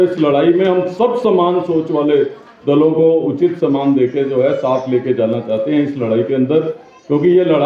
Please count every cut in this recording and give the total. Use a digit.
0